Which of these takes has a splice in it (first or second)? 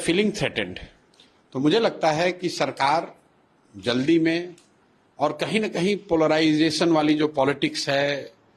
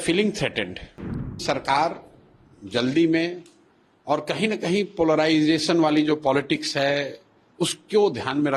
second